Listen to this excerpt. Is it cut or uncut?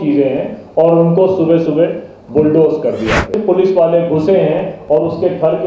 cut